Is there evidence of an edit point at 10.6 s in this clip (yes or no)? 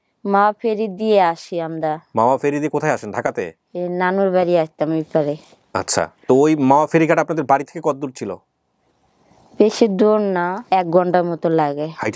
yes